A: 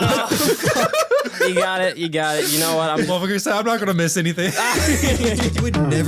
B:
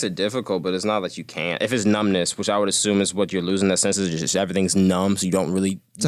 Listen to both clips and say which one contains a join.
A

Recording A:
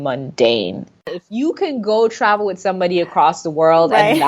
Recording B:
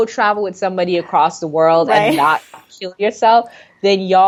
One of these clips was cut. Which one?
A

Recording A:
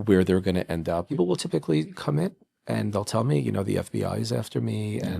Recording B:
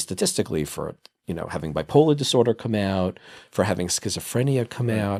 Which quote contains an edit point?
A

